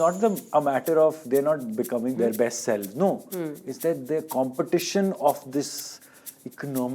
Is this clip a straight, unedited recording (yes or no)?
no